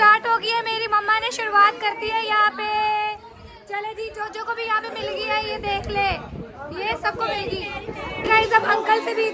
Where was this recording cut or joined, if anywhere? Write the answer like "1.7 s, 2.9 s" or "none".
8.2 s